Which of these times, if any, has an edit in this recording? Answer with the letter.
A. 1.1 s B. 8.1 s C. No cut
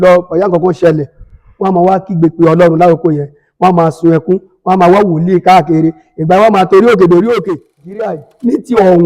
B